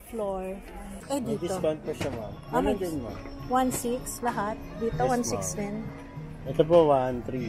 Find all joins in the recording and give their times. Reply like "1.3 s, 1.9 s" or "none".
0.9 s